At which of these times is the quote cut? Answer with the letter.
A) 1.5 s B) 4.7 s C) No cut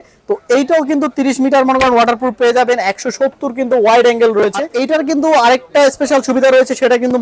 B